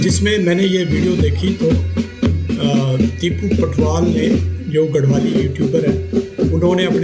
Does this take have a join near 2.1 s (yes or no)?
no